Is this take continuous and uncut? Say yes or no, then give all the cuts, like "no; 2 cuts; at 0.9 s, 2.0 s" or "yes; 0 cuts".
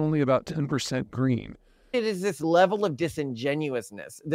no; 1 cut; at 1.9 s